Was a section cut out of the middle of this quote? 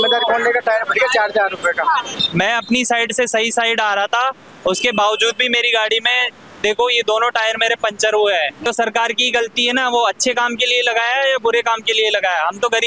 yes; 2 cuts; at 2.2 s, 8.6 s

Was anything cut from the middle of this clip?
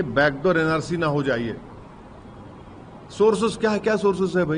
no; 0 cuts

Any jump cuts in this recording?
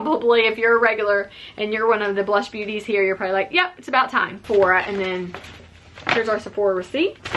yes; 1 cut; at 4.4 s

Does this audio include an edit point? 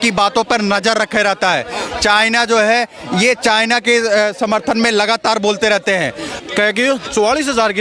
yes; 1 cut; at 6.3 s

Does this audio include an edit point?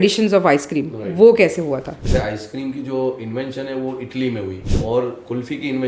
yes; 2 cuts; at 2.0 s, 4.6 s

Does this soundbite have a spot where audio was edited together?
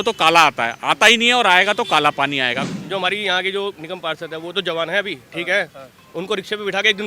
yes; 1 cut; at 2.7 s

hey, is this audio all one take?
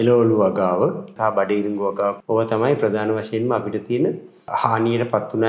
no; 3 cuts; at 1.1 s, 2.2 s, 4.5 s

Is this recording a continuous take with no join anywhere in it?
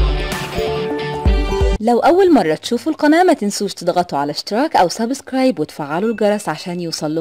no; 1 cut; at 1.8 s

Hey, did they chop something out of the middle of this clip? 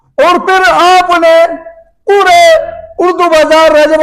no; 0 cuts

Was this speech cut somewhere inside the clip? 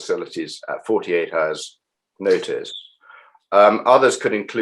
no; 0 cuts

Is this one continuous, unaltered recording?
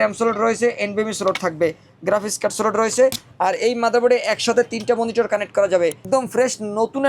no; 1 cut; at 6.0 s

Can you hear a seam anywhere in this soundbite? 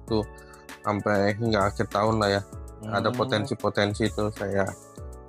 no; 0 cuts

